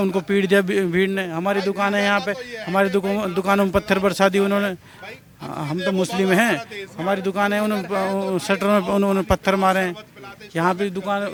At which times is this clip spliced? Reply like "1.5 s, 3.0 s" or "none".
none